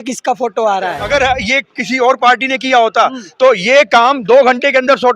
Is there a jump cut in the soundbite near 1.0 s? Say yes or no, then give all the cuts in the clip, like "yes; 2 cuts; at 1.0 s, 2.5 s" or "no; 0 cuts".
yes; 1 cut; at 1.0 s